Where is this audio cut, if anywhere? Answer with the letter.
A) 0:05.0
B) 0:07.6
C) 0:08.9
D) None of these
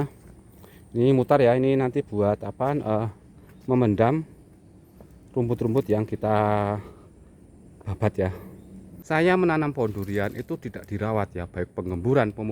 C